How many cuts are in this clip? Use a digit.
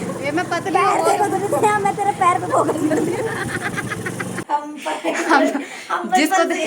1